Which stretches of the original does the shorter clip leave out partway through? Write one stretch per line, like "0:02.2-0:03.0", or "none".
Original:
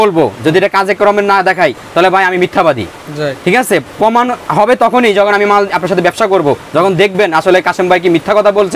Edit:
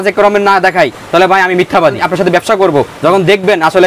0:02.9-0:05.7